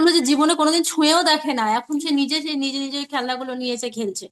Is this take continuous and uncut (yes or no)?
yes